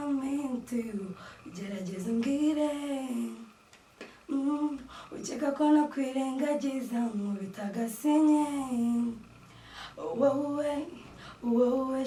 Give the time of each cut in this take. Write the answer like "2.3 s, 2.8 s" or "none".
none